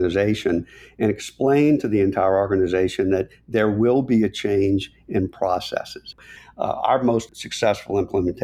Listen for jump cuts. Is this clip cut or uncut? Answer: cut